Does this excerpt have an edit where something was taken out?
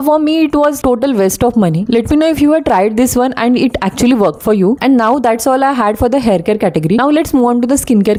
no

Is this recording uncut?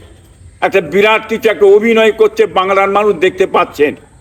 yes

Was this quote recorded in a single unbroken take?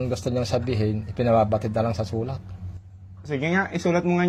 yes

